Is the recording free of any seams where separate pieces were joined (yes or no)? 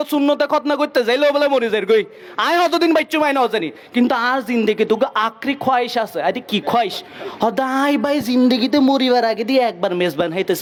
yes